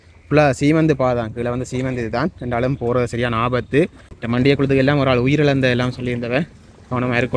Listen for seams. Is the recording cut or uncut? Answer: cut